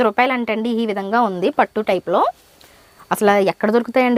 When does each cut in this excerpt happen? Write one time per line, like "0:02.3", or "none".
none